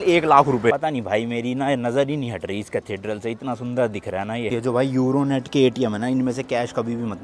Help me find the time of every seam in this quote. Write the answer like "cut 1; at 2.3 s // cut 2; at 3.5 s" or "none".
cut 1; at 0.7 s // cut 2; at 4.5 s